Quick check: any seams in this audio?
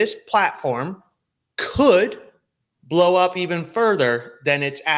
no; 0 cuts

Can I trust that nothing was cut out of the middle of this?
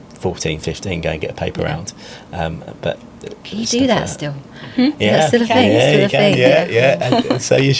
yes; 0 cuts

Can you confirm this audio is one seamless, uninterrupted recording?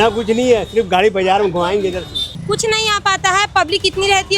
no; 1 cut; at 2.3 s

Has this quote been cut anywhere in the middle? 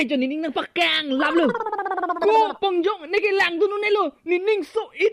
no; 0 cuts

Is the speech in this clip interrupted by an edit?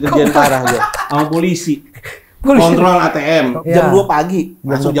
yes; 1 cut; at 3.6 s

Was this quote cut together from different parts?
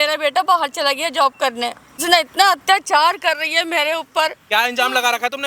yes; 2 cuts; at 2.0 s, 4.4 s

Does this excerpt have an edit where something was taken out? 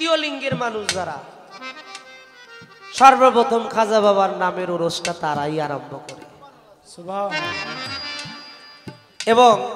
no; 0 cuts

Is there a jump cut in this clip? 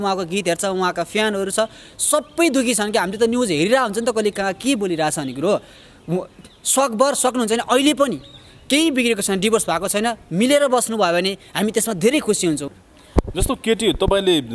yes; 1 cut; at 12.6 s

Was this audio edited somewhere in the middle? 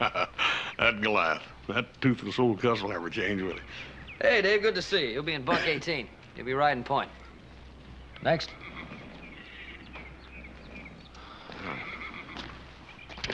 no; 0 cuts

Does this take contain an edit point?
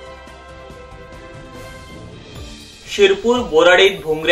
yes; 1 cut; at 2.4 s

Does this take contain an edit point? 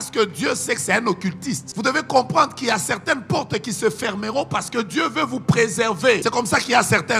yes; 2 cuts; at 1.7 s, 6.2 s

